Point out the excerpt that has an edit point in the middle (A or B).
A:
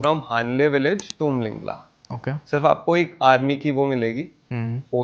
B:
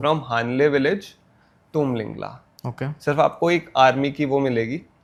A